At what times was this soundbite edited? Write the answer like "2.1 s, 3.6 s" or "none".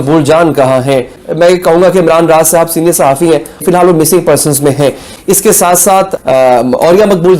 1.1 s, 3.6 s, 5.1 s